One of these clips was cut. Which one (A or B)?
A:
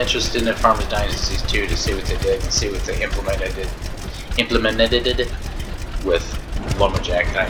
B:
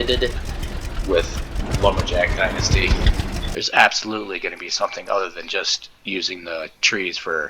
B